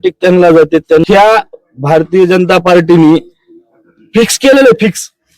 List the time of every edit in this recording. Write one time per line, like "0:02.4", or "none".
0:01.0